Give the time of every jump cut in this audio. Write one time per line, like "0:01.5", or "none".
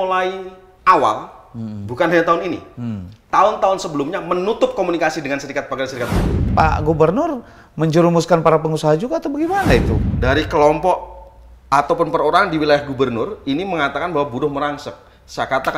0:06.5
0:09.9